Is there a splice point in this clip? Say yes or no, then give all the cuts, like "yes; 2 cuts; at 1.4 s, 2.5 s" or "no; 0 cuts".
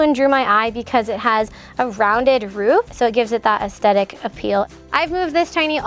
yes; 2 cuts; at 2.9 s, 4.8 s